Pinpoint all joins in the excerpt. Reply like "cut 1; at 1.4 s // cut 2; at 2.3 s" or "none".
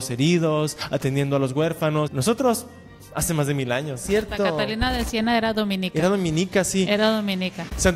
cut 1; at 2.1 s // cut 2; at 4.0 s